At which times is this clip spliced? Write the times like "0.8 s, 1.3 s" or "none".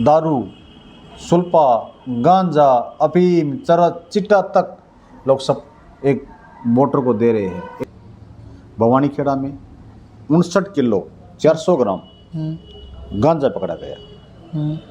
7.7 s